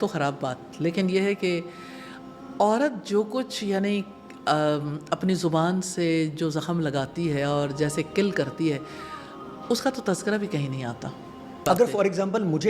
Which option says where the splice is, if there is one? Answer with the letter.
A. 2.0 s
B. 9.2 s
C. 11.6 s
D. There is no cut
C